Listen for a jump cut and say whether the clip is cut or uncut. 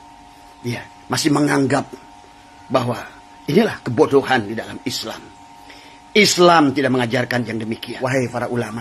cut